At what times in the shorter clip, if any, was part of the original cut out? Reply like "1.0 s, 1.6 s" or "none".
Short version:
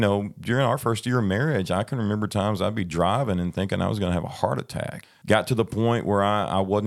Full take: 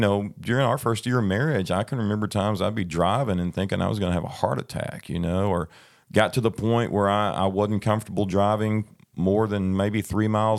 5.0 s

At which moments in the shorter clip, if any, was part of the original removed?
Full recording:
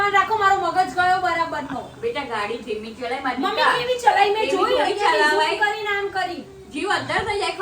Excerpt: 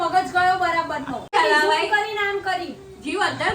1.3 s

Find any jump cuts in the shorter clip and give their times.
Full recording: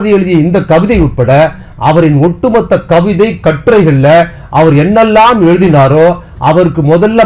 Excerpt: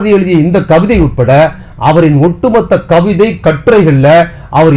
none

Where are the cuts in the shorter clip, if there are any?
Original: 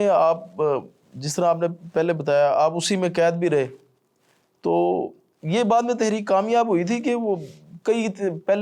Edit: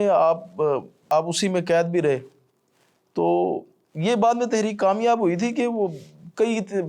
1.1 s

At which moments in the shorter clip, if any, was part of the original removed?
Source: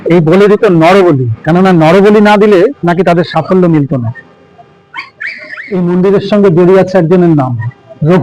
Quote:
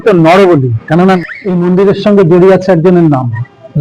1.2 s

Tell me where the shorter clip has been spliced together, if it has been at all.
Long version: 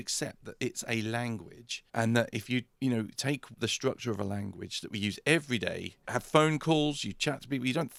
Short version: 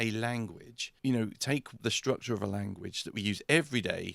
0.9 s

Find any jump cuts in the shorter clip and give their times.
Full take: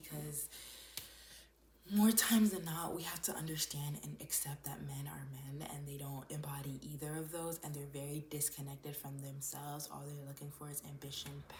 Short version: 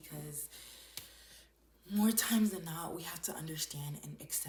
none

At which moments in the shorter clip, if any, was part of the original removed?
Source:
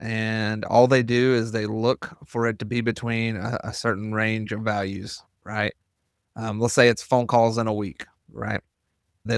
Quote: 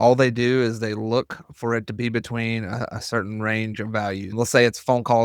4.3 s

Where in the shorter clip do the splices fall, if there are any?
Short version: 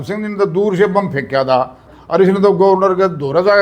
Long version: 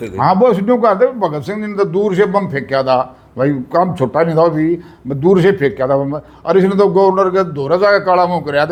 1.8 s

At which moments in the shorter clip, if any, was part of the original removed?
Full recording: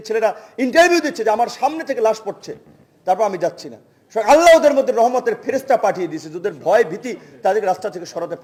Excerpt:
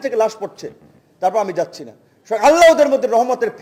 none

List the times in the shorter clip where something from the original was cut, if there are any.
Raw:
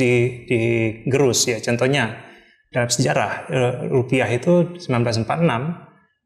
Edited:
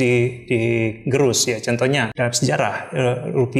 2.1 s

